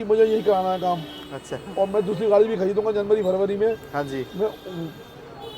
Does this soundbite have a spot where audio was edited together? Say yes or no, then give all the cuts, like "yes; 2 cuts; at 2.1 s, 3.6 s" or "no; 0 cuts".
no; 0 cuts